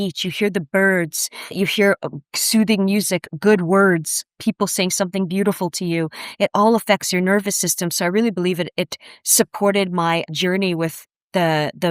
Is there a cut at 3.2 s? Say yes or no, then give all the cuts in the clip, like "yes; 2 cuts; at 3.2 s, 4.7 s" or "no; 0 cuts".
no; 2 cuts; at 1.5 s, 10.3 s